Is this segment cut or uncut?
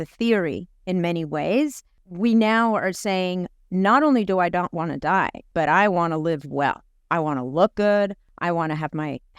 cut